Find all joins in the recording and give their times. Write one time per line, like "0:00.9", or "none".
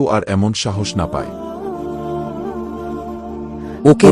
none